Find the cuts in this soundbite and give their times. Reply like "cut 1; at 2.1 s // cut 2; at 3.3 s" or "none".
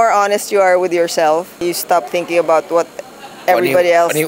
cut 1; at 1.6 s